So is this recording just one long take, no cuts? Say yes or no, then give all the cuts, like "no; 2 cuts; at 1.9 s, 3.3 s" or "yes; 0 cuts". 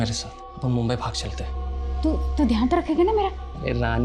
yes; 0 cuts